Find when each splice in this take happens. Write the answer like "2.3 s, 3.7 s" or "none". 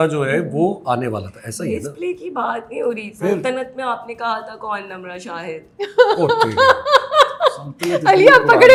none